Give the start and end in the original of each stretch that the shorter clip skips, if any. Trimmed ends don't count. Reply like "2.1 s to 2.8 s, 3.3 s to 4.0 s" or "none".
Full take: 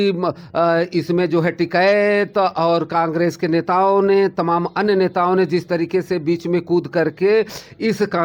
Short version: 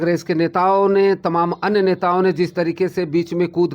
none